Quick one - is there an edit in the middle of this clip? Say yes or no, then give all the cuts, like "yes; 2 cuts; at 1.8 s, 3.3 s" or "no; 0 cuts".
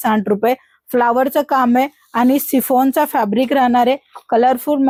no; 0 cuts